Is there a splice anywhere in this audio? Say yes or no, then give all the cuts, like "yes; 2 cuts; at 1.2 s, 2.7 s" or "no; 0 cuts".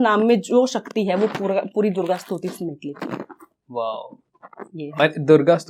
no; 0 cuts